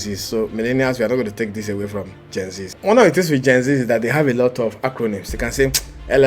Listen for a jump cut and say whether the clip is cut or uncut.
cut